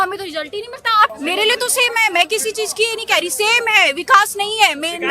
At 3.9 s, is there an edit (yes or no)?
no